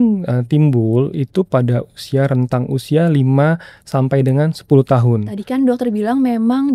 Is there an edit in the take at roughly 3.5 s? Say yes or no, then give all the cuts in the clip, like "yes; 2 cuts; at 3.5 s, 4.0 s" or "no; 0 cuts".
no; 1 cut; at 5.3 s